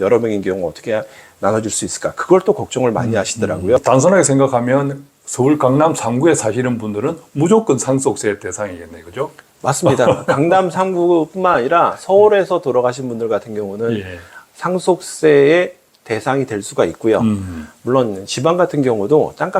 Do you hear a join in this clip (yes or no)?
yes